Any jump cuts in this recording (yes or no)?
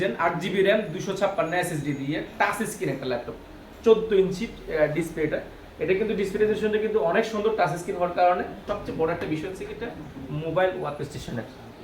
yes